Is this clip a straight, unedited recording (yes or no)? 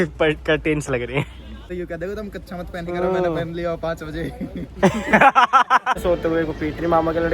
no